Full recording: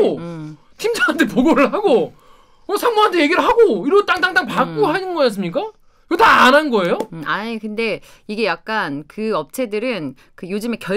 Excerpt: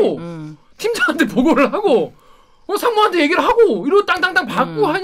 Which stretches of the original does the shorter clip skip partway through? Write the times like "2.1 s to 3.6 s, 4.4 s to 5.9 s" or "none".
none